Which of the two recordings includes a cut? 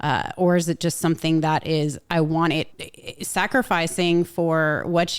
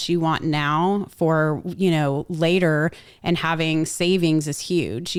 first; 1 cut; at 2.8 s

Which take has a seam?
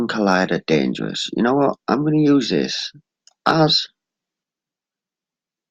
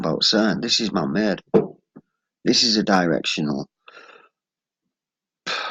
first; 1 cut; at 2.8 s

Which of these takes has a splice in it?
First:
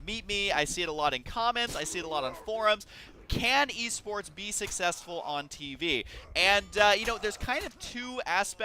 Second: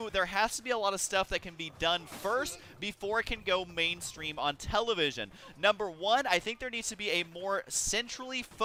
first; 1 cut; at 2.4 s

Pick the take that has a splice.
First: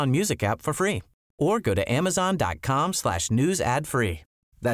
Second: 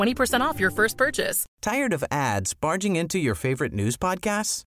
second; 1 cut; at 1.5 s

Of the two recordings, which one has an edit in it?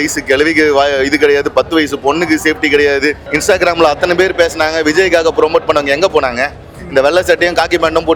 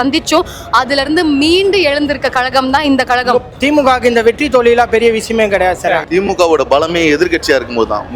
second; 2 cuts; at 3.5 s, 6.0 s

